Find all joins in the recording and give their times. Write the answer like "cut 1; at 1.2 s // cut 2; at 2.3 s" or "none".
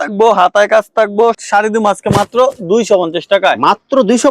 cut 1; at 1.4 s